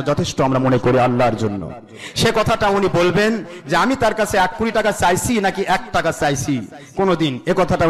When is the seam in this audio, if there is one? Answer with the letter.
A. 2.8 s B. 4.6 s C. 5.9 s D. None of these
D